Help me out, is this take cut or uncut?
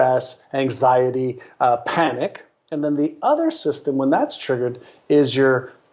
uncut